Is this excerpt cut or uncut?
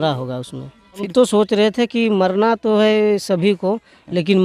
cut